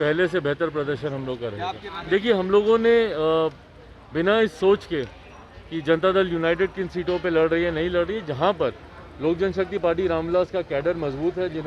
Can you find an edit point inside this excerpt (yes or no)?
yes